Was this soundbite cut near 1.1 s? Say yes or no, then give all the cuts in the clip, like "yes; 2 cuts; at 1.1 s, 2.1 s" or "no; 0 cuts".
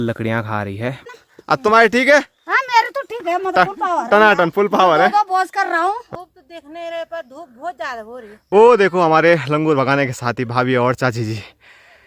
yes; 3 cuts; at 1.1 s, 6.1 s, 8.3 s